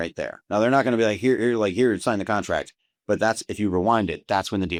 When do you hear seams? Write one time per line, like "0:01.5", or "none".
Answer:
none